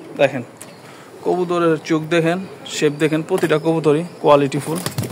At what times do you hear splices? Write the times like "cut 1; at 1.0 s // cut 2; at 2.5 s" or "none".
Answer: none